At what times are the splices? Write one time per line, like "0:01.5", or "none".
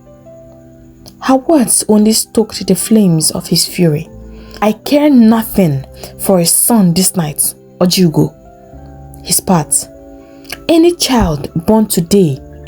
0:04.6